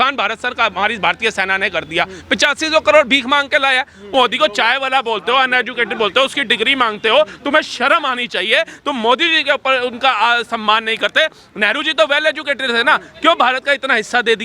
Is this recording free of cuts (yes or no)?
no